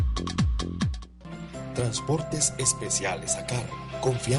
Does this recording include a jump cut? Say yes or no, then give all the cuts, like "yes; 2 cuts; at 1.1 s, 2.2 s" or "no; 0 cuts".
yes; 1 cut; at 1.1 s